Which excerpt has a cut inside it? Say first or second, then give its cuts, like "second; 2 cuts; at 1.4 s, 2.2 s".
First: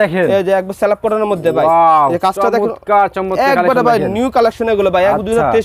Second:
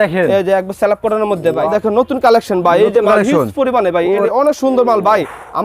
second; 2 cuts; at 1.7 s, 4.2 s